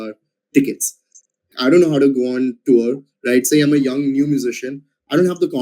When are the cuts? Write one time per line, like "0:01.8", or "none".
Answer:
0:01.4

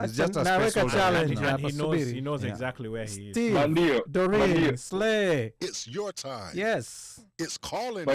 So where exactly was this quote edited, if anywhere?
none

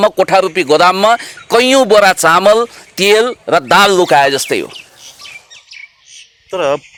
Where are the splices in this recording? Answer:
none

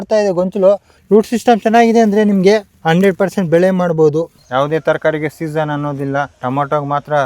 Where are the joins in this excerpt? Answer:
0:00.9
0:02.7
0:04.4
0:06.3

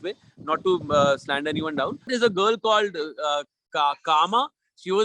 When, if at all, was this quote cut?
0:02.1

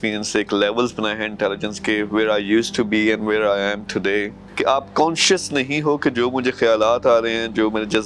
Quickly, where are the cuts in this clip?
0:04.5

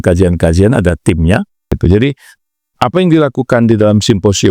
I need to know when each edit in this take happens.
0:01.7

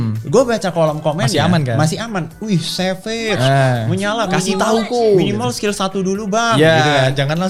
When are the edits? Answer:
none

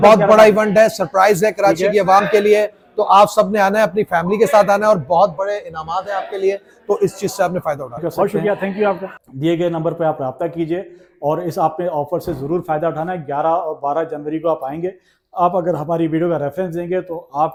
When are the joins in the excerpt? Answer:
none

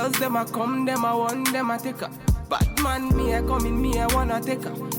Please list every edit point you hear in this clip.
none

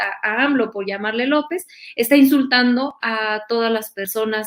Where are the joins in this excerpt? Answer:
none

